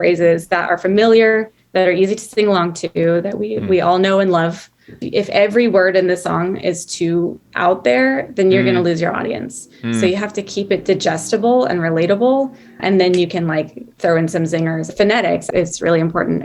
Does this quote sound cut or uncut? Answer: cut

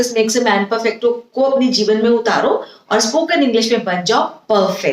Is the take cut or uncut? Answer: uncut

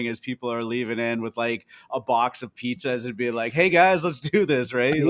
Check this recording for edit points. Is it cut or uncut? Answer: uncut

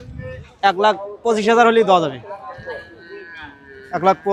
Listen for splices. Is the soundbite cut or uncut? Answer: uncut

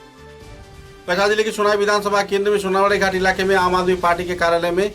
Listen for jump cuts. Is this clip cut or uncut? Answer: cut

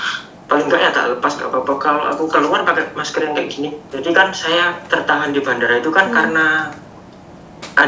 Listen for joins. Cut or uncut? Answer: cut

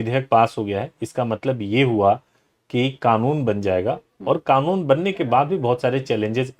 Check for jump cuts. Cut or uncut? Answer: uncut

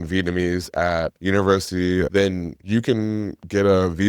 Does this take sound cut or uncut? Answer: cut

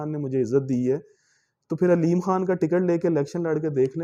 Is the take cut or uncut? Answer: uncut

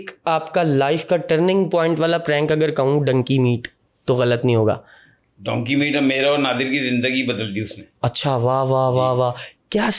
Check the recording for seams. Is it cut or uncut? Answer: uncut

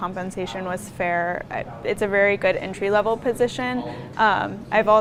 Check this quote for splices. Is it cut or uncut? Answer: uncut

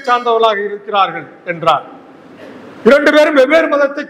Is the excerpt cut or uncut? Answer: uncut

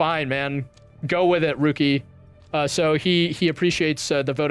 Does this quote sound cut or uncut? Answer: uncut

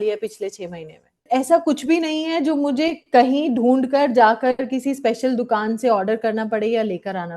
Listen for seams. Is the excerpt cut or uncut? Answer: cut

